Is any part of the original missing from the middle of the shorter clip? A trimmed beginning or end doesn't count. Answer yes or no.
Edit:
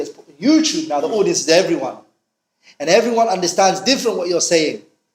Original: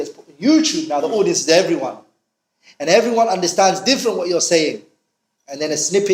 no